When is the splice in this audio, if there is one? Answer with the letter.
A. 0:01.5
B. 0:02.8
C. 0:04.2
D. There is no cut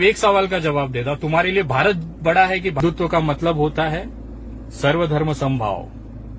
B